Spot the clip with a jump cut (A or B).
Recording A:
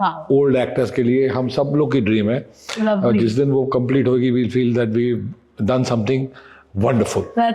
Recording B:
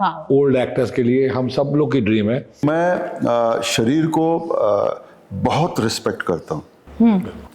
B